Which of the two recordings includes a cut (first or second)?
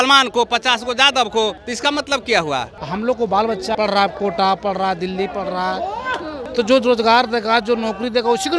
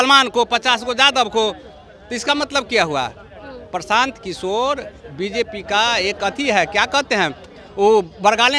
first